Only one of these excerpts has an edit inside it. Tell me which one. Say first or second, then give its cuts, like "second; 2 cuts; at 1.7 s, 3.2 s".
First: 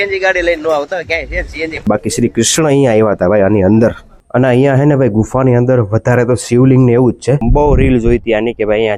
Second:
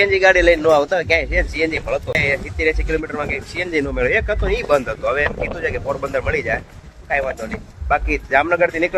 first; 3 cuts; at 1.9 s, 4.1 s, 7.4 s